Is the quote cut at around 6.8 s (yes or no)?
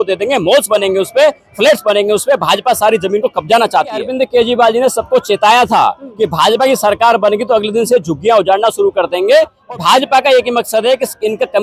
no